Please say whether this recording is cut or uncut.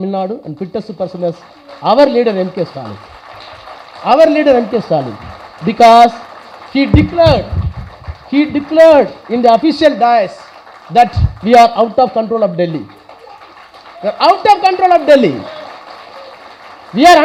uncut